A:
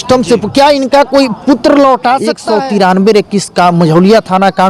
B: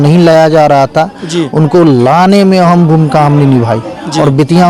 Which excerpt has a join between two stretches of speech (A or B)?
A